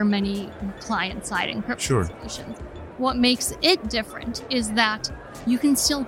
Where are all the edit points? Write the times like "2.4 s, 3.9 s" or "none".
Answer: none